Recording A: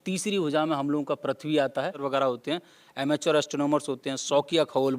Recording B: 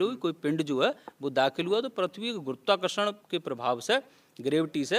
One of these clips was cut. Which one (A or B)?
A